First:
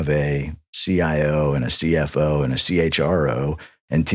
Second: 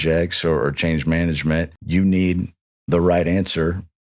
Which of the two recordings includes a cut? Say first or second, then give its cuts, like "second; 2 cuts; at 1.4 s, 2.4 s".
second; 1 cut; at 1.8 s